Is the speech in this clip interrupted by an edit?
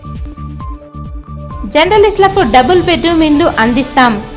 no; 0 cuts

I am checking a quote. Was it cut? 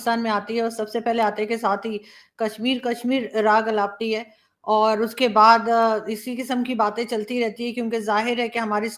no; 0 cuts

